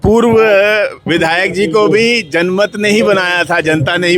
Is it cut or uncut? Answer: cut